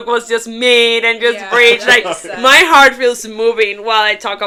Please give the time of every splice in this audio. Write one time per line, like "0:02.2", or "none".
none